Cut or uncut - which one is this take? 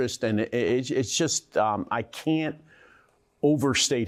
uncut